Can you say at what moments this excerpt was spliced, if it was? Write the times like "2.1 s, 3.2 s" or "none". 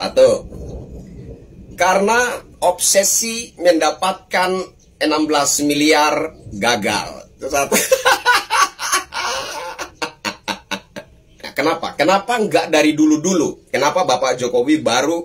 11.2 s